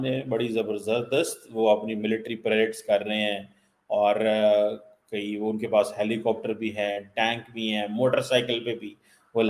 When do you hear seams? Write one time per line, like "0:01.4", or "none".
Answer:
none